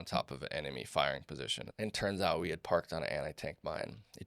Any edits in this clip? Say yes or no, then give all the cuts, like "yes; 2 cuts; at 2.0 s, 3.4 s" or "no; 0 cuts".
yes; 1 cut; at 1.7 s